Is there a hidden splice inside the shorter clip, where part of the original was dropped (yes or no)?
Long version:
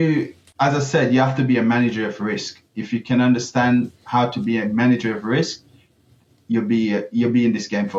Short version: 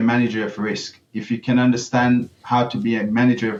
no